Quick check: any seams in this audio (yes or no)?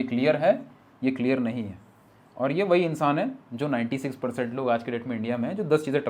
no